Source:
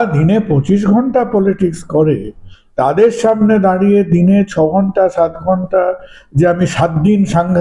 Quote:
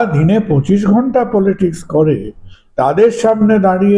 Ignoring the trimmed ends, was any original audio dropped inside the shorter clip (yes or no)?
no